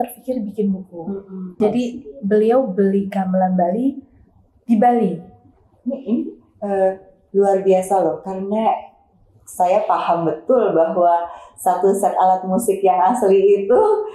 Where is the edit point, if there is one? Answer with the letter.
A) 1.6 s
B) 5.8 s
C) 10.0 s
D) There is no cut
A